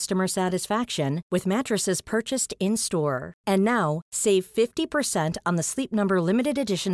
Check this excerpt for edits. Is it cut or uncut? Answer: uncut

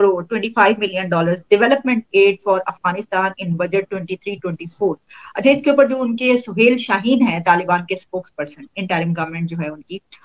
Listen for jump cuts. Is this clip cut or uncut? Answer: uncut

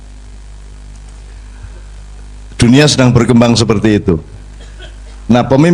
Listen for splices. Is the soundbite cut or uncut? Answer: uncut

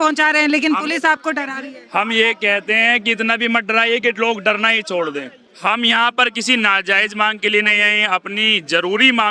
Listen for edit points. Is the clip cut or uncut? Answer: cut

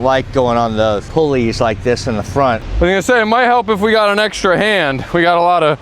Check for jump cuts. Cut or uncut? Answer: cut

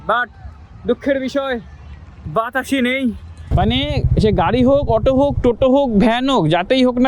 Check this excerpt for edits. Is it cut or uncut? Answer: cut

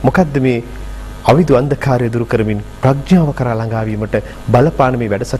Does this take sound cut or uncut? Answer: uncut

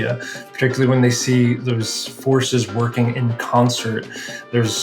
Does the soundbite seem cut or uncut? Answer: cut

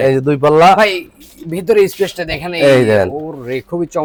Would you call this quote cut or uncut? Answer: uncut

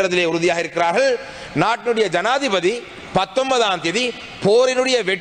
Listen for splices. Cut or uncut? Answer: uncut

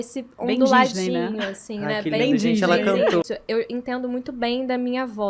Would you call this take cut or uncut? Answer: cut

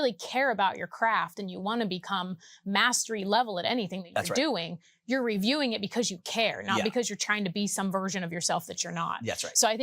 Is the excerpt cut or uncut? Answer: uncut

